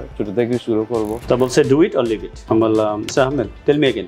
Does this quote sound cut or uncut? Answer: cut